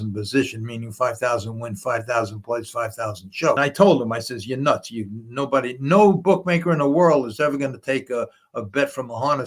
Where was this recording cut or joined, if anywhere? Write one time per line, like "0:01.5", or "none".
0:03.6